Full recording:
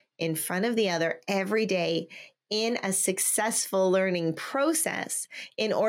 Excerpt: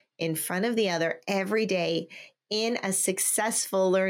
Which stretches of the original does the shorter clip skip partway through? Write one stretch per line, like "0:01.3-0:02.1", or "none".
none